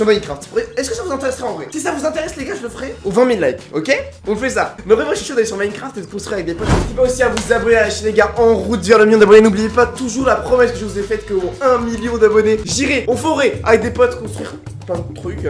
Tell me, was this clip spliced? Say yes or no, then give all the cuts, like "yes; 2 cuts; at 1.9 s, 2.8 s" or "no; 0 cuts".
yes; 1 cut; at 6.7 s